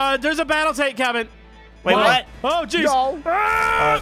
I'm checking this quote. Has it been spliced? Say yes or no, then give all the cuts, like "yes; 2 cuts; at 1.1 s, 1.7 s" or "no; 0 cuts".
no; 0 cuts